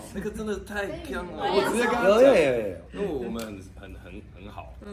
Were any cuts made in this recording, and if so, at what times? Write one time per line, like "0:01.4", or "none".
0:01.5